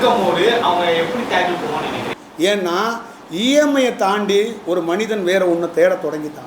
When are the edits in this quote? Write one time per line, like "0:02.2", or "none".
0:02.1